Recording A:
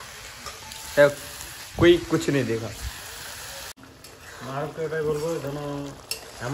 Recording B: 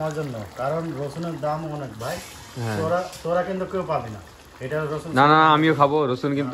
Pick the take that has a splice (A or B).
A